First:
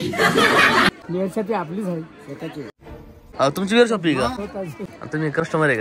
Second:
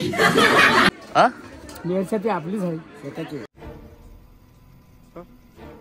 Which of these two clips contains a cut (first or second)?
first